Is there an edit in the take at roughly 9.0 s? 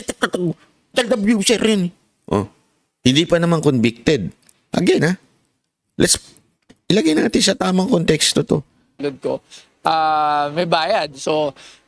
yes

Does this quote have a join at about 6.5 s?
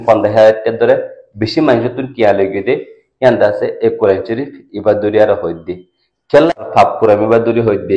yes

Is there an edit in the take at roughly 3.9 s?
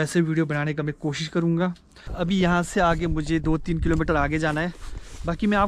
no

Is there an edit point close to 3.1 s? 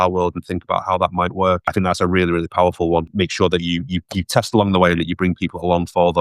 yes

